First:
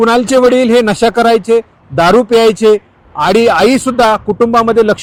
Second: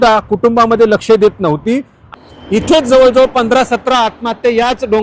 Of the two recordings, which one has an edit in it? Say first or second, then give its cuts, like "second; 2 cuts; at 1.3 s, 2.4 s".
second; 1 cut; at 2.1 s